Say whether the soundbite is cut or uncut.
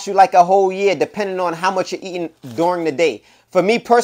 uncut